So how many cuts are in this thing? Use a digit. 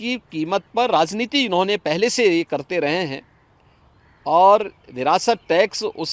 0